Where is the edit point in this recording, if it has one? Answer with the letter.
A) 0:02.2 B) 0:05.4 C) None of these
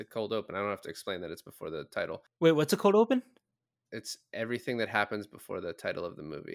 A